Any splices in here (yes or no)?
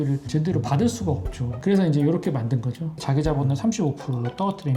yes